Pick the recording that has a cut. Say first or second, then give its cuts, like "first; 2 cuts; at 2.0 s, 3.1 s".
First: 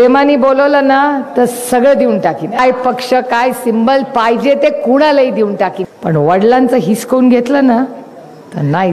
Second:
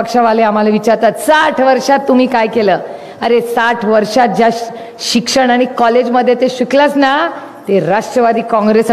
first; 2 cuts; at 2.6 s, 5.8 s